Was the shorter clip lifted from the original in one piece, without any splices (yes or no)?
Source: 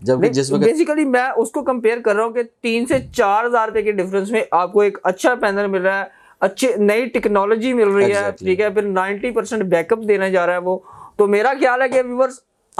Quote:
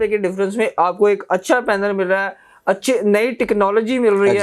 yes